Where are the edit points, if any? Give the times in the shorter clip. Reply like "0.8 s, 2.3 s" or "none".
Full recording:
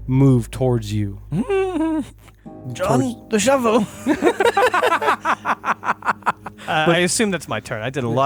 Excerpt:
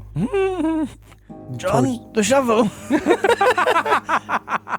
none

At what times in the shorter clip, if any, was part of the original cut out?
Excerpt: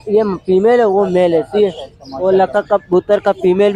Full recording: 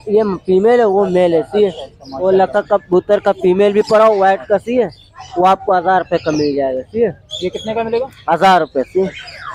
none

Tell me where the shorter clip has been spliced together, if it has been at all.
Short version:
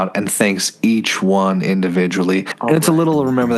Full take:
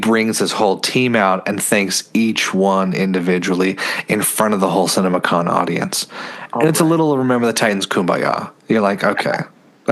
2.5 s

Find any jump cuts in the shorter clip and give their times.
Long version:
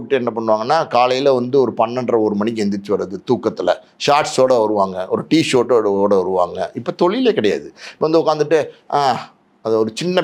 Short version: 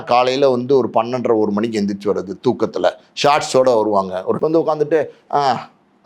4.3 s

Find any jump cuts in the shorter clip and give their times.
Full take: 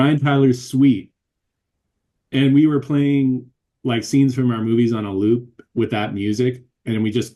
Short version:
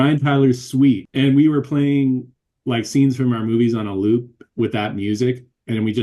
1.1 s

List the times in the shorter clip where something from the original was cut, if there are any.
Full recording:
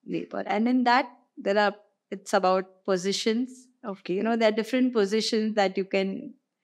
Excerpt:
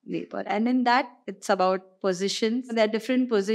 1.2 s, 2.7 s

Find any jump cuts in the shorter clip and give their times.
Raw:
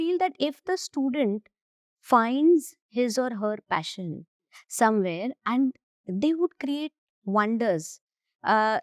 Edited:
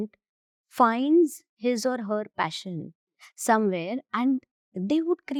none

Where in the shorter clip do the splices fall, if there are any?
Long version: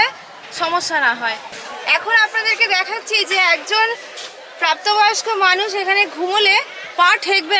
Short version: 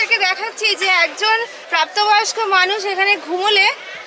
1.6 s

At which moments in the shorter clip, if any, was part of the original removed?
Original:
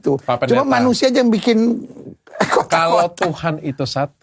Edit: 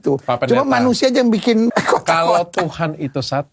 1.7 s

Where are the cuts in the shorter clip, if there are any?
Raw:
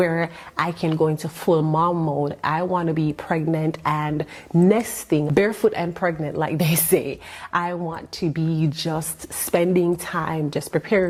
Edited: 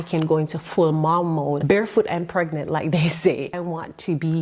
1.6 s, 3.6 s

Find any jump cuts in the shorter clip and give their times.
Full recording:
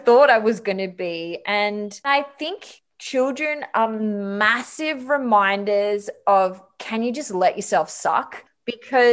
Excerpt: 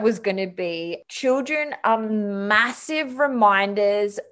0.9 s

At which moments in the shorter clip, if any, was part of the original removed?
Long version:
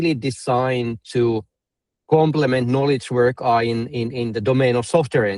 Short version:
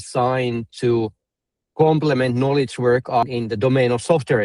3.2 s

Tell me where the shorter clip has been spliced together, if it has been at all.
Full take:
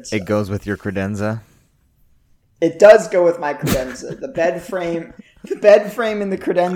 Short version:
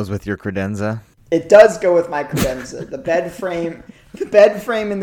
1.1 s

